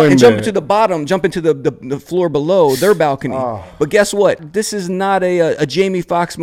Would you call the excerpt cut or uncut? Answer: cut